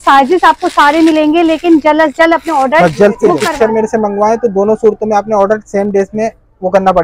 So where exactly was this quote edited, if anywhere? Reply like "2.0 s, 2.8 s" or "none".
3.4 s